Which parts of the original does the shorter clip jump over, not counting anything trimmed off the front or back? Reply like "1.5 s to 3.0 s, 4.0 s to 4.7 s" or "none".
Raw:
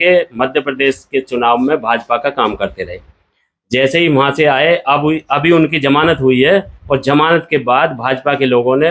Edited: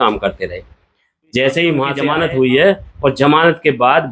4.3 s to 5.8 s